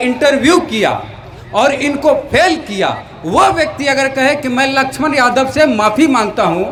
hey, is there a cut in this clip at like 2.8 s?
no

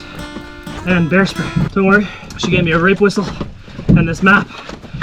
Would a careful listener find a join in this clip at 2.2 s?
yes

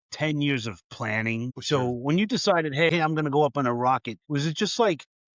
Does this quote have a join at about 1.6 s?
yes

